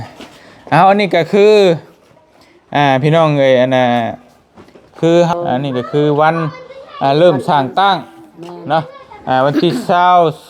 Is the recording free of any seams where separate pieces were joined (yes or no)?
no